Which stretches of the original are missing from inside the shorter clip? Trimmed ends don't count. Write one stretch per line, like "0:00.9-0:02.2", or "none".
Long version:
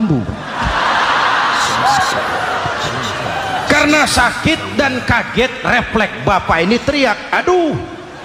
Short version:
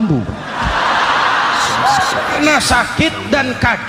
0:02.4-0:03.8